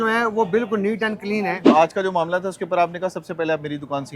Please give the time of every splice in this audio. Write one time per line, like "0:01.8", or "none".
0:01.5